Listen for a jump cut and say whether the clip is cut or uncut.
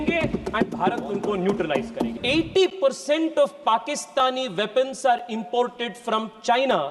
cut